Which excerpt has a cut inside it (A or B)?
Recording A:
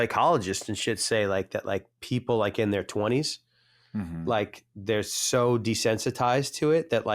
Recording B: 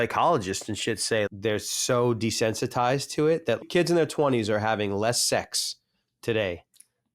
B